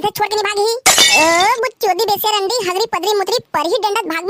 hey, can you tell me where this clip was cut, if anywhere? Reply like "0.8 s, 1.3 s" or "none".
none